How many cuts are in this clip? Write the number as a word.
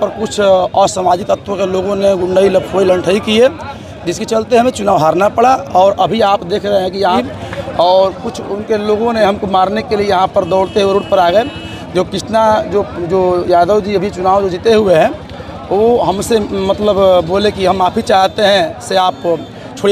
one